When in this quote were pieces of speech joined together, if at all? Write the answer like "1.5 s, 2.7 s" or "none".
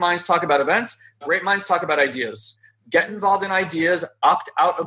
1.2 s